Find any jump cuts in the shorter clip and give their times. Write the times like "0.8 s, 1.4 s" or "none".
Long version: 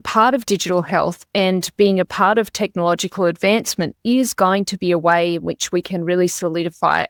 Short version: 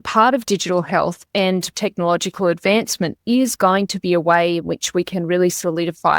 1.7 s